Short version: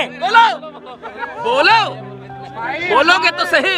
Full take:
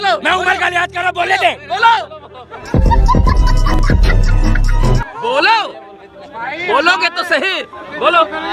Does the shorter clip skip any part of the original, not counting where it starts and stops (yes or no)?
yes